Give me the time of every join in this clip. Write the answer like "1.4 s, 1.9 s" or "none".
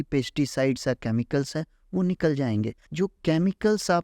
2.8 s